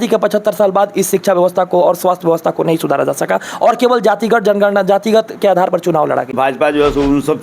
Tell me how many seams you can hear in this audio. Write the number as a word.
one